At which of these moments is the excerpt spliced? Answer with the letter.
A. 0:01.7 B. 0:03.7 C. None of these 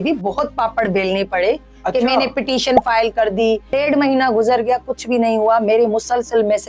B